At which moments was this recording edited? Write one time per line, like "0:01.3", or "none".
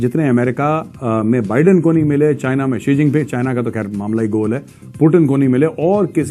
none